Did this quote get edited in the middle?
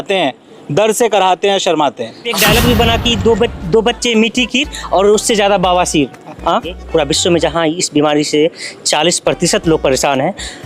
yes; 2 cuts; at 2.2 s, 6.8 s

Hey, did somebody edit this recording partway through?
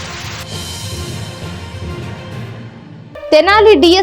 yes; 1 cut; at 2.6 s

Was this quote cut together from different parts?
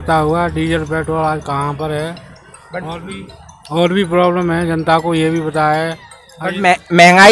no; 0 cuts

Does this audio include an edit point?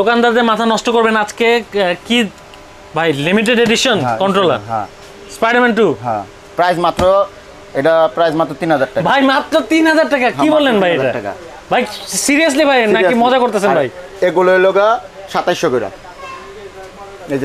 no; 0 cuts

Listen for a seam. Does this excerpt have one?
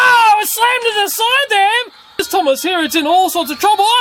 yes; 1 cut; at 2.2 s

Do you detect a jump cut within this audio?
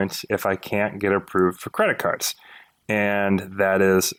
no; 0 cuts

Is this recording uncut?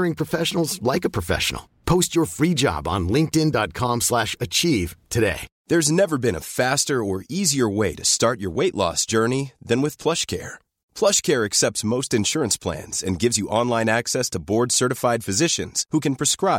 no; 1 cut; at 5.5 s

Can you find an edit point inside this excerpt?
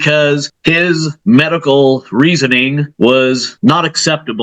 yes; 3 cuts; at 0.8 s, 2.8 s, 3.5 s

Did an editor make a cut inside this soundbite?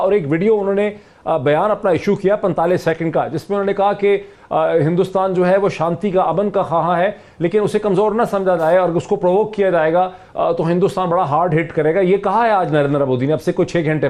no; 0 cuts

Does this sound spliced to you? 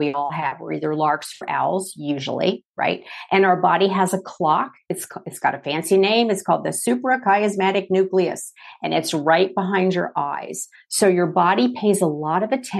no; 0 cuts

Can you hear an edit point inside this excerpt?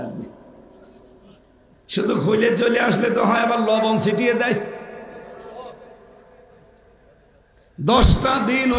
no; 0 cuts

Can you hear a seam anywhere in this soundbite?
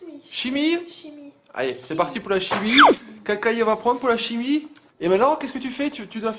yes; 1 cut; at 4.8 s

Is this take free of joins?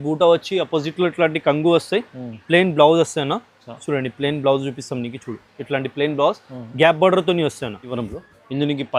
no; 1 cut; at 7.9 s

